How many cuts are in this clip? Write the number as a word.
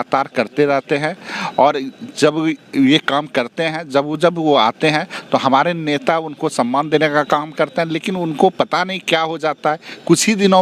zero